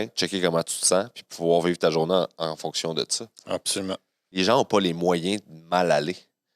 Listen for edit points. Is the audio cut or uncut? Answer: cut